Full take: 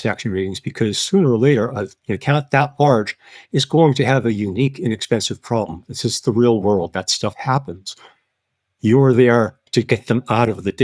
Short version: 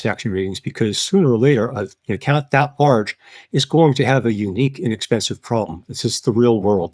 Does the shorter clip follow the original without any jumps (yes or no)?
yes